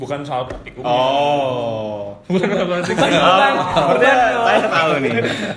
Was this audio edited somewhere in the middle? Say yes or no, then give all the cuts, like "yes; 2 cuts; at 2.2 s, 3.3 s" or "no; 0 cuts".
no; 0 cuts